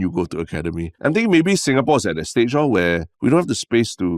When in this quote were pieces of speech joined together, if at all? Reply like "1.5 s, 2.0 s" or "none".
0.9 s, 3.1 s